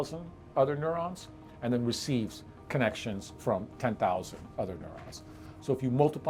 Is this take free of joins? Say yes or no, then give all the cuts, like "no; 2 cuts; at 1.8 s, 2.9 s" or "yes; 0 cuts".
yes; 0 cuts